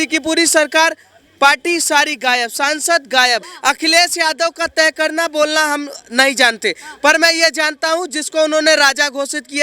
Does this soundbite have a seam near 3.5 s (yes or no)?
yes